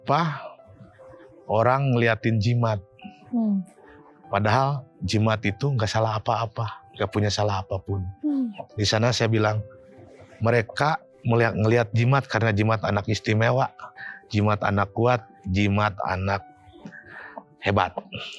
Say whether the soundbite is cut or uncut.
uncut